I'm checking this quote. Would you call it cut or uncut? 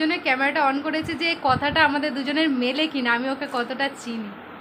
uncut